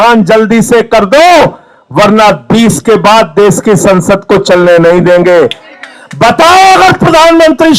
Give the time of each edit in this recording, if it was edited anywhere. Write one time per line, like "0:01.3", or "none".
0:05.7